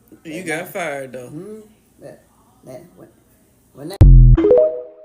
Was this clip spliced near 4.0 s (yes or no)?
yes